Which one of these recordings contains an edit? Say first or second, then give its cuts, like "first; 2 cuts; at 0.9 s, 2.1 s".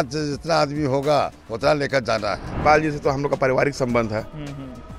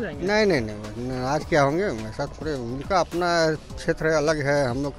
first; 1 cut; at 2.6 s